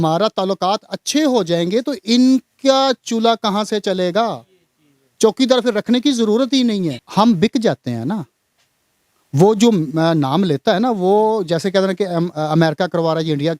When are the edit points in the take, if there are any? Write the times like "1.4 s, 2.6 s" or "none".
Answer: 7.0 s